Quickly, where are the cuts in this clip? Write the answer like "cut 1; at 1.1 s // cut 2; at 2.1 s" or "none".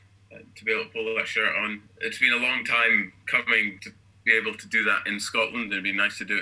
cut 1; at 1.9 s // cut 2; at 3.8 s